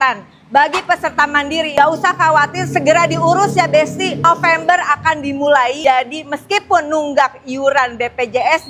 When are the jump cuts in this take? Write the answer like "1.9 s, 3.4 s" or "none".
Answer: 1.7 s